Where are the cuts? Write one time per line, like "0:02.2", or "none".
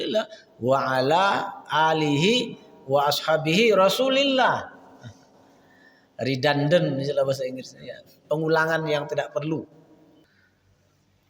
0:10.2